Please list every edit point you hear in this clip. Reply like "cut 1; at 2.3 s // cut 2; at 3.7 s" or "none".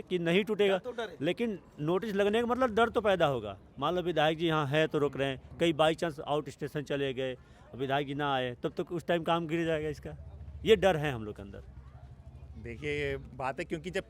none